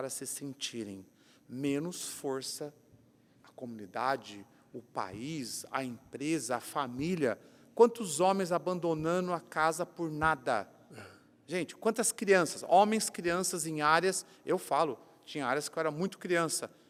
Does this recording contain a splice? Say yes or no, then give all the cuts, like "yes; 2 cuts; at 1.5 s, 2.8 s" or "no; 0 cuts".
no; 0 cuts